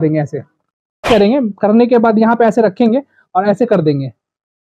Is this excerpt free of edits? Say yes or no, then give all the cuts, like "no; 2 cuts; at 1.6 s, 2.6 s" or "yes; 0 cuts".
no; 1 cut; at 1.1 s